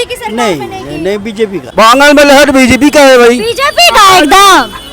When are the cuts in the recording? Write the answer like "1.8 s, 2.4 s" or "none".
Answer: 1.6 s